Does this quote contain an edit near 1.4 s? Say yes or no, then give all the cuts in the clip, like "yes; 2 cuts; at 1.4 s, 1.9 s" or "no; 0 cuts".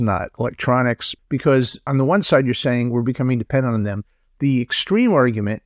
yes; 1 cut; at 1.4 s